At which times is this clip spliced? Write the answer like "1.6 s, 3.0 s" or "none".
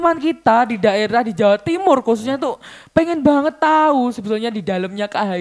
none